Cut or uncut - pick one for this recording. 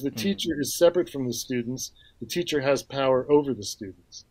uncut